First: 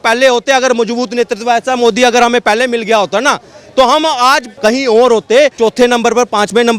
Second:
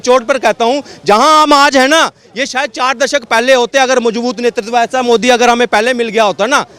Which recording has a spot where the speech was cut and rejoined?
first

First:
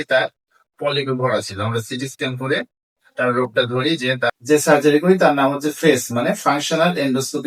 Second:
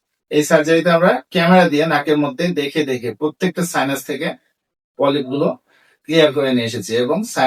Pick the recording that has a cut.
first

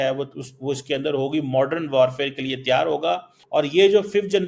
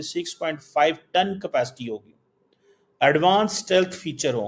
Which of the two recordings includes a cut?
first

